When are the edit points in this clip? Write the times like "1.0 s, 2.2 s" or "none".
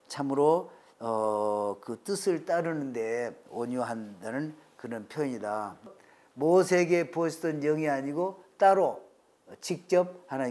6.0 s